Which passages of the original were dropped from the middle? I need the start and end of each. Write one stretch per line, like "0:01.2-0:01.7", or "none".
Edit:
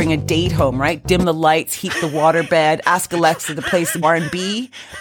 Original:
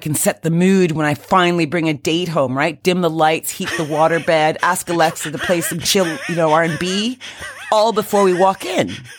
0:05.8-0:06.5

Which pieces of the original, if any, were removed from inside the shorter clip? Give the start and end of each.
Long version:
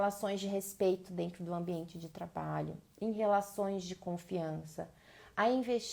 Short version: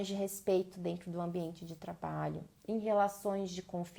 none

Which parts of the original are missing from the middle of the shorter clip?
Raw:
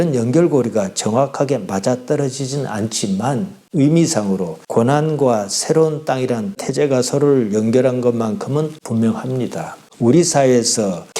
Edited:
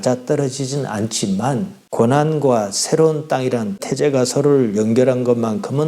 0:03.6-0:04.6

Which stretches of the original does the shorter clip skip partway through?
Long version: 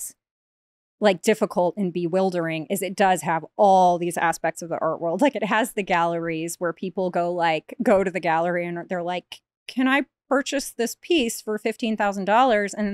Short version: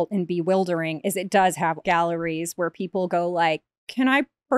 0:03.5-0:05.8
0:07.7-0:09.5

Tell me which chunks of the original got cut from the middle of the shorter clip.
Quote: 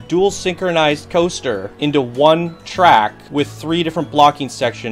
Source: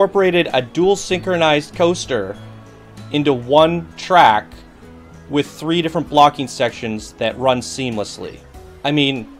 0:02.3-0:03.0
0:04.5-0:05.2

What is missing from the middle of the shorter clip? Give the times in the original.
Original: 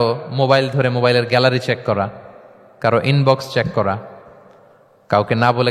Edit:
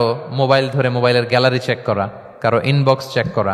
0:02.2-0:02.6

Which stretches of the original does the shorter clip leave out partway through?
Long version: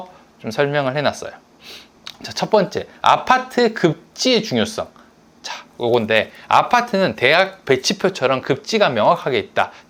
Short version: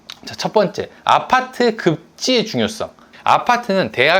0:05.1-0:06.4

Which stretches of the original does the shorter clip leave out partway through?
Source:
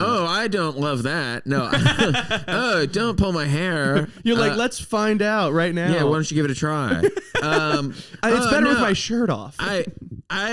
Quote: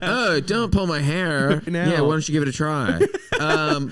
0:04.2-0:05.7

